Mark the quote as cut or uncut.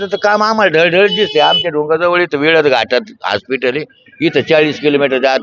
uncut